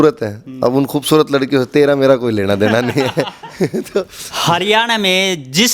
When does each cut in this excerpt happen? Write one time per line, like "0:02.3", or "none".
0:04.2